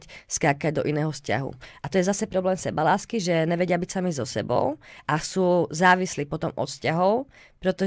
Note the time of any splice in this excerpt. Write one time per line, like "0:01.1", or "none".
none

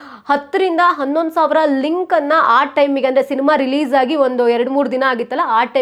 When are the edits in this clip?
none

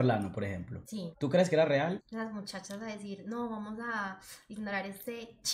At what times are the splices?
0:02.0

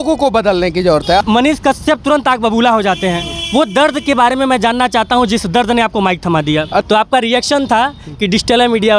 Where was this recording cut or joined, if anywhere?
0:01.2
0:06.8

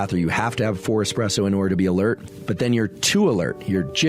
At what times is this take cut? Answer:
0:02.3

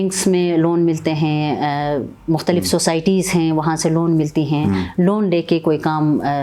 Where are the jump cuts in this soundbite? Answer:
none

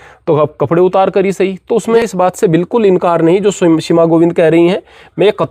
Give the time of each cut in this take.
0:02.0

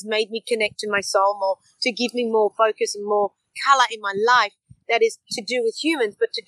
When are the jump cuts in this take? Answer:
0:03.5

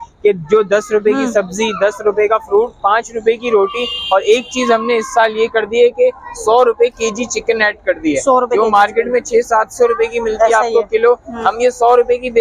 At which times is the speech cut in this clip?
none

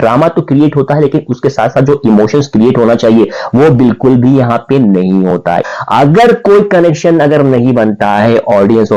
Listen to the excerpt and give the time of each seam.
0:05.6

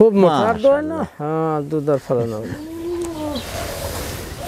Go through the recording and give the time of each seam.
none

